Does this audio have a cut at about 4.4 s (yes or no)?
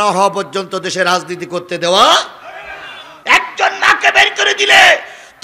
no